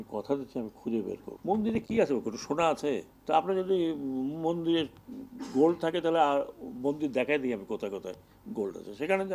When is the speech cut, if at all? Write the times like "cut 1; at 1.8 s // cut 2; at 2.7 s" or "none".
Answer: cut 1; at 1.3 s // cut 2; at 3.1 s